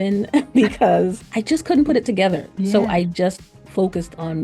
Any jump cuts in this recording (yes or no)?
yes